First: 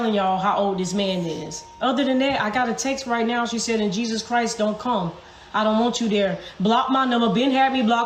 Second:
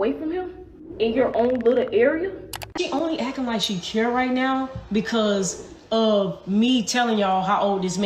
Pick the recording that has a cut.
second; 1 cut; at 2.7 s

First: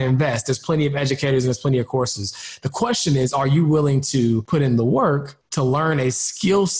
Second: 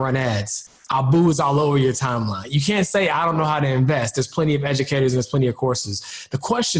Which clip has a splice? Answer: first; 2 cuts; at 4.4 s, 5.4 s

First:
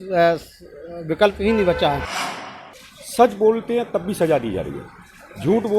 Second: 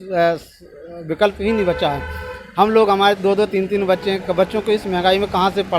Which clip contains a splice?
first; 1 cut; at 2.4 s

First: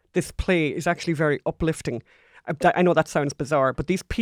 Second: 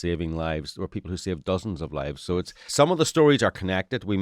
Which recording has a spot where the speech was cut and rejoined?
second; 1 cut; at 2.6 s

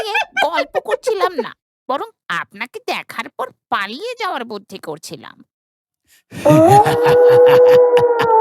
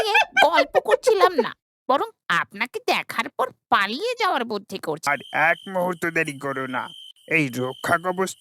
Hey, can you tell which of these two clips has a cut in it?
second; 1 cut; at 5.0 s

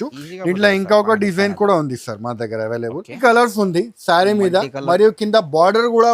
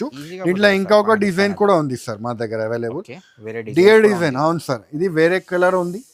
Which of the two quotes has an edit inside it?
first; 1 cut; at 3.2 s

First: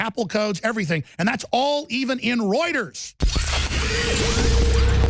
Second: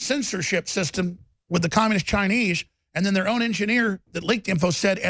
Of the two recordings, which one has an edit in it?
first; 1 cut; at 3.3 s

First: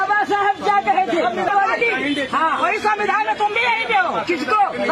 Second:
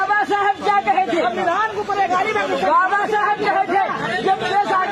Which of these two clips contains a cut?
first; 1 cut; at 1.5 s

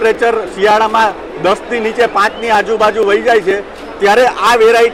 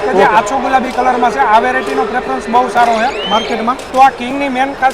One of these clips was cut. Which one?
second; 1 cut; at 3.8 s

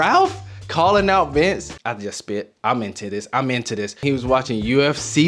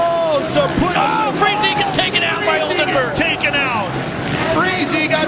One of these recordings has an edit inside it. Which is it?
first; 2 cuts; at 1.7 s, 4.0 s

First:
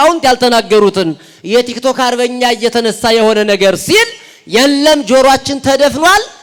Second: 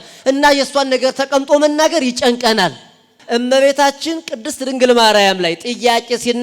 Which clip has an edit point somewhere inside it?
second; 1 cut; at 3.1 s

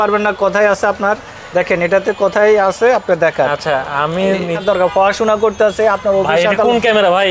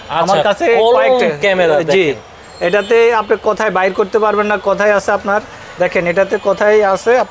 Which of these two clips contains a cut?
first; 1 cut; at 4.6 s

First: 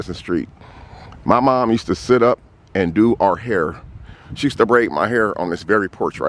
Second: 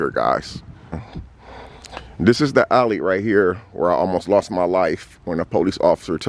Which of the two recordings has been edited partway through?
second; 1 cut; at 1.1 s

